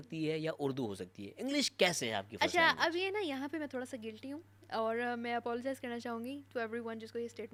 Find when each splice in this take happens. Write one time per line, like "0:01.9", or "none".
none